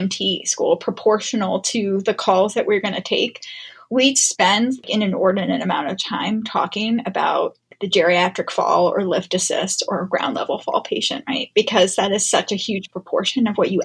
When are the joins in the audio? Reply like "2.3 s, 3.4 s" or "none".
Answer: none